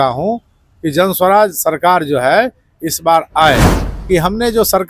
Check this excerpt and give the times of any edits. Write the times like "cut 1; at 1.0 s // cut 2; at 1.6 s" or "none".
cut 1; at 3.7 s